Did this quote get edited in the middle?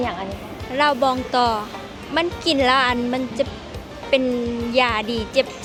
no; 0 cuts

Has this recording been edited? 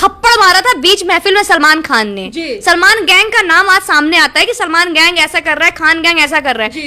no; 0 cuts

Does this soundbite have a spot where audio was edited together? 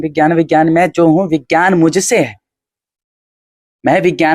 no; 0 cuts

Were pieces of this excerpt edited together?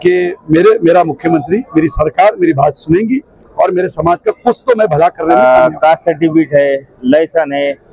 yes; 1 cut; at 5.2 s

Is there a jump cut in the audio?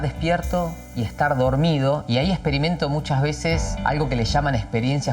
yes; 2 cuts; at 2.0 s, 3.7 s

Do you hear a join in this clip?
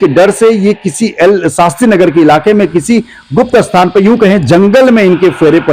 no; 0 cuts

